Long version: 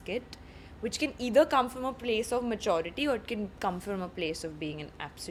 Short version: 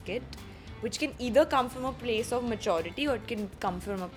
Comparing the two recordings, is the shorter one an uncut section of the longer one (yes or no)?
yes